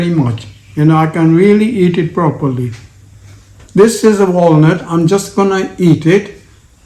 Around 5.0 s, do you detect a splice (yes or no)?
no